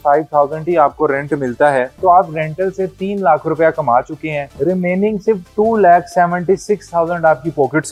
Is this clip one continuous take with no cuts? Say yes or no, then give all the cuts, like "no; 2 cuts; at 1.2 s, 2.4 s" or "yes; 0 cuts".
yes; 0 cuts